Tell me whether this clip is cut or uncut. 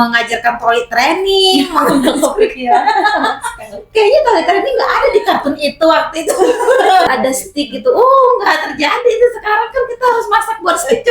cut